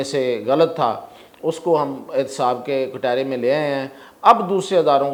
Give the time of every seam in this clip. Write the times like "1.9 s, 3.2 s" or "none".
none